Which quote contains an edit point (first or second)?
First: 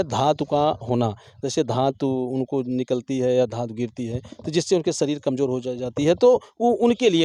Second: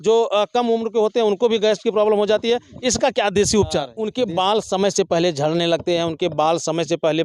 second